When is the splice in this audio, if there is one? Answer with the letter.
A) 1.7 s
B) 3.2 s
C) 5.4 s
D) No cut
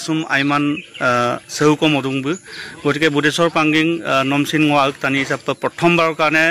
D